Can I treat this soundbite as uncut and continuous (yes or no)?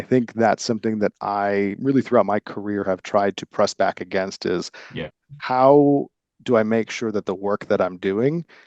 yes